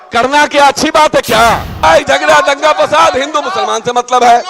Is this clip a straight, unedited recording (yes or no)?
no